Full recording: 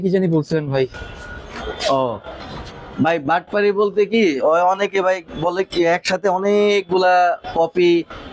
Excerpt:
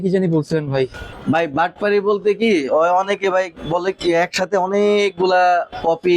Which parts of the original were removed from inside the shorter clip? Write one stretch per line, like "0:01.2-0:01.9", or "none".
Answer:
0:01.1-0:02.8